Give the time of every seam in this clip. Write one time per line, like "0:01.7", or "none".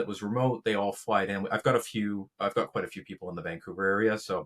none